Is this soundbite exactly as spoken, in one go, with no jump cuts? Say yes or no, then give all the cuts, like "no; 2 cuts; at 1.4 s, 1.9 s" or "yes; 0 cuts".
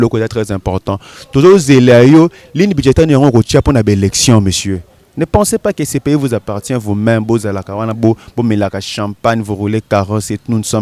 yes; 0 cuts